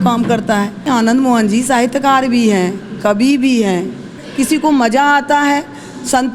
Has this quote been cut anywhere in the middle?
yes; 2 cuts; at 0.9 s, 4.2 s

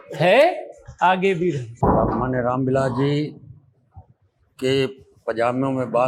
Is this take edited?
yes; 1 cut; at 1.7 s

